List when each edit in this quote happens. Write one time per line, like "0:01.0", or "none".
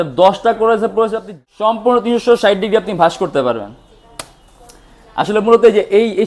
0:01.3